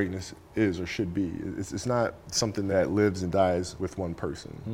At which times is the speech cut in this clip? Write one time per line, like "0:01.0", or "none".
0:02.7
0:03.7

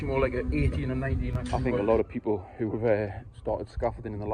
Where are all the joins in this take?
0:01.4

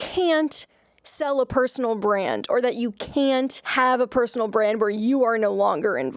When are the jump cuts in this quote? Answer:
0:03.6

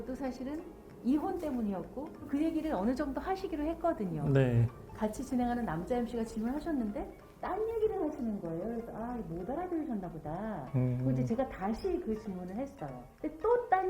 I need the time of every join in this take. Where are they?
0:02.2
0:04.8

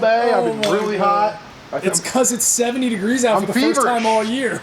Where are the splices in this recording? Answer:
0:01.5

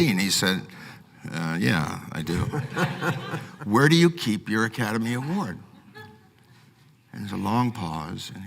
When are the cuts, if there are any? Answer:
0:03.4

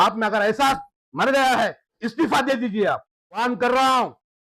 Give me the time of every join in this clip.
0:02.0
0:03.4

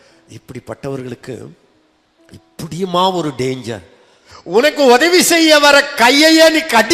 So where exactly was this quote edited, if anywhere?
0:04.2

